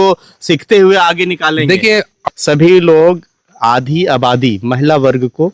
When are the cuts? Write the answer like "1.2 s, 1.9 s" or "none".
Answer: 2.1 s